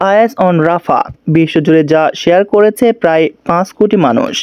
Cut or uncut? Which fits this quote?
uncut